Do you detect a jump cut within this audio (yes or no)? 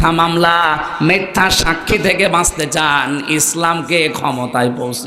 no